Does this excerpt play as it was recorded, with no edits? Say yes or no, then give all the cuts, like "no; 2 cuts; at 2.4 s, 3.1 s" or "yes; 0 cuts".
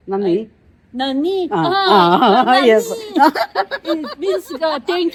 yes; 0 cuts